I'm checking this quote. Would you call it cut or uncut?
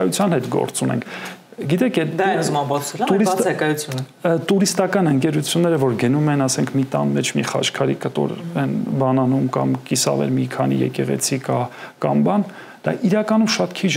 uncut